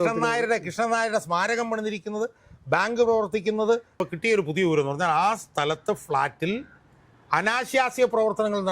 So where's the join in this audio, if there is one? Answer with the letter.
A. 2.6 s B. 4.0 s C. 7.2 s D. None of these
B